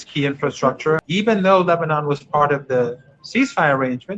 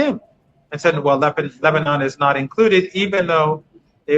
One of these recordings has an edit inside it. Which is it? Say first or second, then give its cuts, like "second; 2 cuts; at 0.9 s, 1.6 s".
first; 1 cut; at 1.0 s